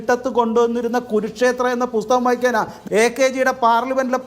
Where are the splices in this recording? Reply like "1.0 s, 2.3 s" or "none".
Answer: 2.7 s